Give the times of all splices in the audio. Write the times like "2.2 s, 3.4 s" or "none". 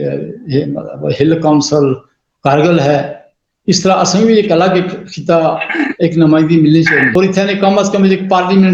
7.1 s